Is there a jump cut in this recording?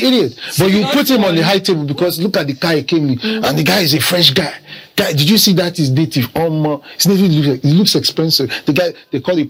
no; 0 cuts

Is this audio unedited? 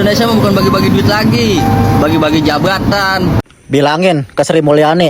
no; 1 cut; at 3.4 s

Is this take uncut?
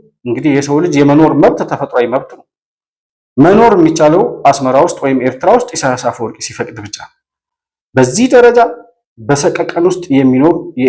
yes; 0 cuts

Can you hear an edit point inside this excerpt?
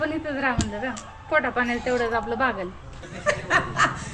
yes; 1 cut; at 3.1 s

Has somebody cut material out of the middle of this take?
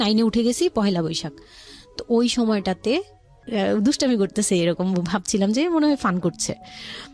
yes; 1 cut; at 3.3 s

